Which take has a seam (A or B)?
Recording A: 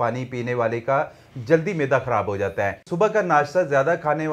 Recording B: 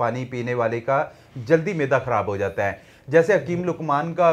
A